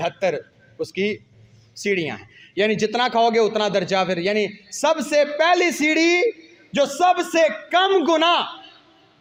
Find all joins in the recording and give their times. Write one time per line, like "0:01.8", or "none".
none